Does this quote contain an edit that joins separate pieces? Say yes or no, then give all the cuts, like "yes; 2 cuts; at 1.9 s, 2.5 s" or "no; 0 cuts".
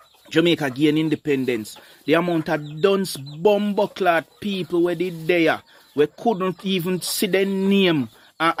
no; 0 cuts